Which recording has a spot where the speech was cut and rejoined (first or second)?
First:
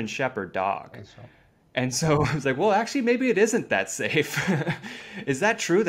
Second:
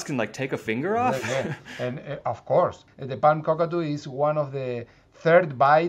second